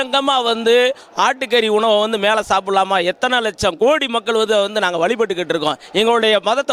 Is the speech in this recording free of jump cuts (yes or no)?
yes